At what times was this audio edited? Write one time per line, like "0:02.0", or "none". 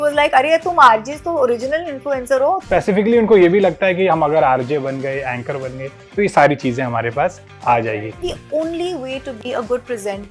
0:02.6
0:07.9